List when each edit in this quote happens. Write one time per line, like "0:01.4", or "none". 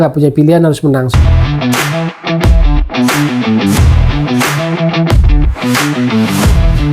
0:01.1